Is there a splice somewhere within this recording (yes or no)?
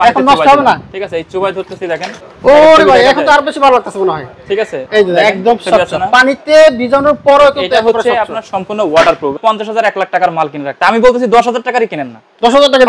yes